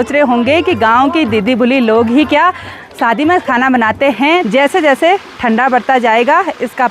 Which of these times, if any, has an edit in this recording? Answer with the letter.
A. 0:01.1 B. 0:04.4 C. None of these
B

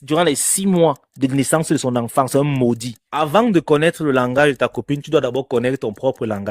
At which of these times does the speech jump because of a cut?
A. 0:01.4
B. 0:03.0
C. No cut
B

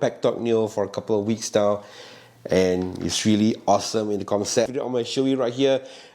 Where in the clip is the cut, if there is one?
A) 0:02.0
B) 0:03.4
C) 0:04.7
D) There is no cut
C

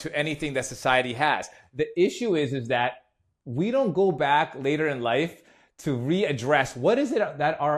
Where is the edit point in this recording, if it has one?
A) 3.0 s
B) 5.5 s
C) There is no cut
C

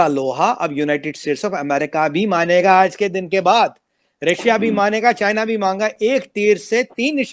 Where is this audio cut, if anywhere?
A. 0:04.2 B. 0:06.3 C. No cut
C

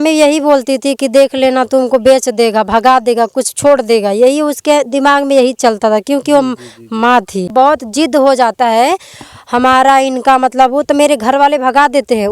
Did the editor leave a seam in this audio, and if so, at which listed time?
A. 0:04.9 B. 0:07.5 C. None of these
B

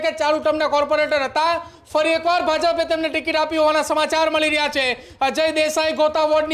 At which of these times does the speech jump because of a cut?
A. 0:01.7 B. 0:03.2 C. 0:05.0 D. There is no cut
D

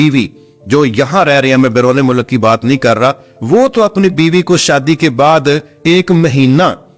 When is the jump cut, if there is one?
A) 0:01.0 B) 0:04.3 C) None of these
C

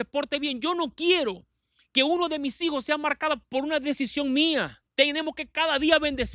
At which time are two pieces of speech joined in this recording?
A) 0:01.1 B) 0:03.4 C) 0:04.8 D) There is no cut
C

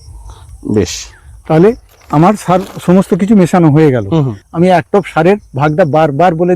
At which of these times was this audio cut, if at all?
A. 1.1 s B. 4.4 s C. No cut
B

